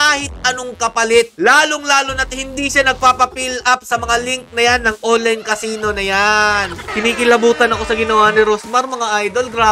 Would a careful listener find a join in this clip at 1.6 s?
no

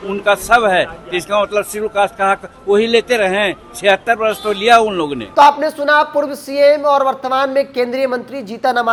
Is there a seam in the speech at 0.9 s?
no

